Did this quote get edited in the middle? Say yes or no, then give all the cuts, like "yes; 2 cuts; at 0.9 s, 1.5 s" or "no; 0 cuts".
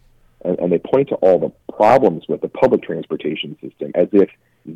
no; 0 cuts